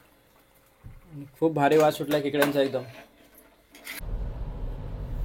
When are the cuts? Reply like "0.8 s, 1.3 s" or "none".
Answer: 4.0 s